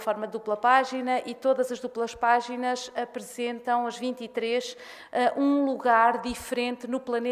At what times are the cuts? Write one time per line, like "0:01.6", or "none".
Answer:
0:03.3